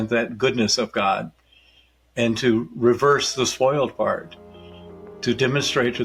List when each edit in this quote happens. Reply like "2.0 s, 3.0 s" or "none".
none